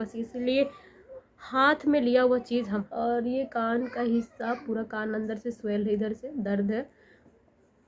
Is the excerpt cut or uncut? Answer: cut